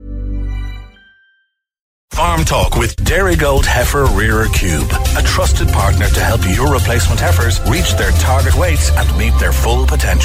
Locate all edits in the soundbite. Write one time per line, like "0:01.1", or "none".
0:02.0